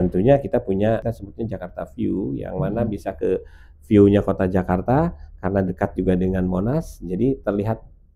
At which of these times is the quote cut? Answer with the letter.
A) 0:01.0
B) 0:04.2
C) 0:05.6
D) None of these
A